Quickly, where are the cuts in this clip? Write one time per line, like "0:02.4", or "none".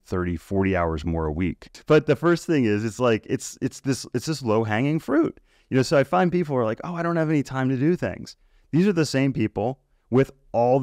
0:01.7